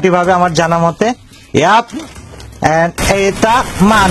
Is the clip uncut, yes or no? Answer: yes